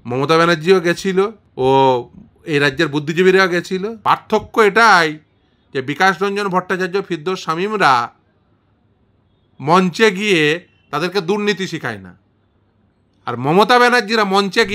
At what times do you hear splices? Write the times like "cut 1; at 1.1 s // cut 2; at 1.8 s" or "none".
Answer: cut 1; at 1.4 s // cut 2; at 3.9 s